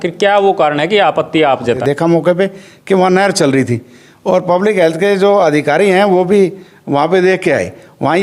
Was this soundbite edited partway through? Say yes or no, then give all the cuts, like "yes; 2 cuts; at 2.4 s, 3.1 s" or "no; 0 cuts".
yes; 1 cut; at 1.8 s